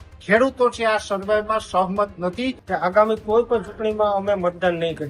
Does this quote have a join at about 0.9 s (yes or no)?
no